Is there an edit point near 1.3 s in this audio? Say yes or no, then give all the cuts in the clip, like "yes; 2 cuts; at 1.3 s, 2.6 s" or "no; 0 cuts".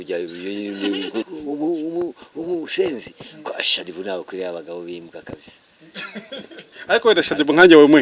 yes; 1 cut; at 1.3 s